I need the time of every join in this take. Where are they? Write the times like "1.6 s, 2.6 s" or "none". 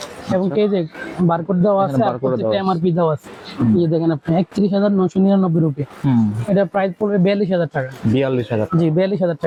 none